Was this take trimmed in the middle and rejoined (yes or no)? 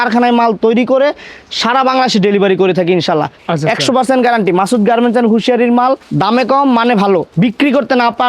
yes